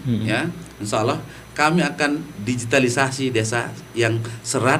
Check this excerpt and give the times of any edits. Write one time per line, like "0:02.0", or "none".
none